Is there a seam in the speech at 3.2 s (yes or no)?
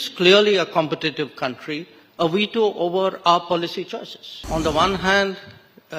no